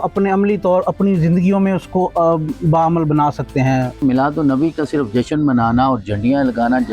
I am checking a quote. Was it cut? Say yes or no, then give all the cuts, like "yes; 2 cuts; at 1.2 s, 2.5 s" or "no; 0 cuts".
yes; 1 cut; at 4.0 s